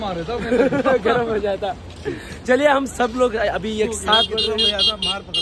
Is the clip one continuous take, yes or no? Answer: yes